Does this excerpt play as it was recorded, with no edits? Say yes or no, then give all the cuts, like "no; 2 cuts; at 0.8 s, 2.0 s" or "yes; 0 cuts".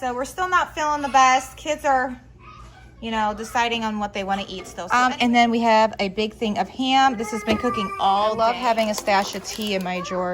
no; 2 cuts; at 4.7 s, 8.4 s